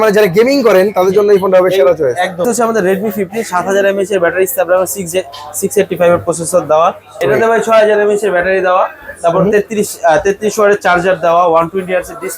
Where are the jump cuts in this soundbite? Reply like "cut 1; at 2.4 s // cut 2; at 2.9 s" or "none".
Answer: cut 1; at 2.4 s // cut 2; at 7.2 s